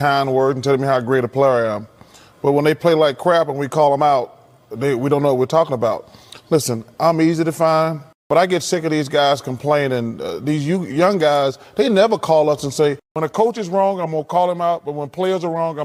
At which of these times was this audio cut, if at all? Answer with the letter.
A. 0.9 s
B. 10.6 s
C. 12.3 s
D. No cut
D